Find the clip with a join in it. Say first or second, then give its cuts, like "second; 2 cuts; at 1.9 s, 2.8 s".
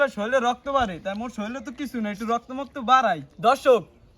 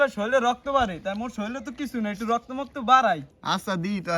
first; 1 cut; at 3.3 s